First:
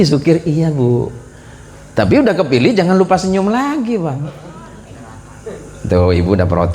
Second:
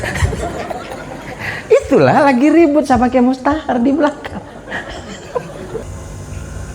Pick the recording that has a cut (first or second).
second